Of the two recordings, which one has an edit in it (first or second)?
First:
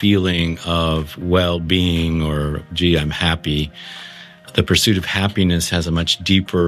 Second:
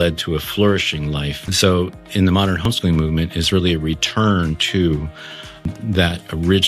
second